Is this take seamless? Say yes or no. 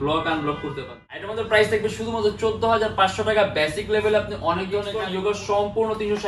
no